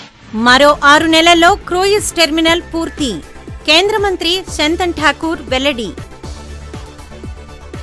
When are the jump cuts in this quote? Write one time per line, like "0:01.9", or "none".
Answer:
none